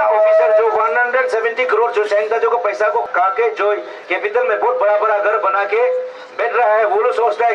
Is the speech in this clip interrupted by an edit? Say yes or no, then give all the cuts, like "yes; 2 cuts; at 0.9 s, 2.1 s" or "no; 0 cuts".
yes; 1 cut; at 3.1 s